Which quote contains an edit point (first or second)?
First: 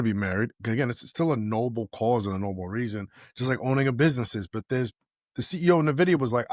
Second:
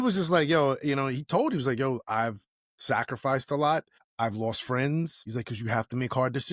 second